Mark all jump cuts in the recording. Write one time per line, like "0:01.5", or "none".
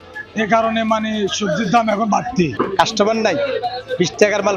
0:02.5